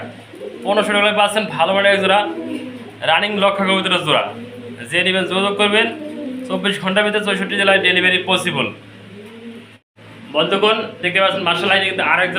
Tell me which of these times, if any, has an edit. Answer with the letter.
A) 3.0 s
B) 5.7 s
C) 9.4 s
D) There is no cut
D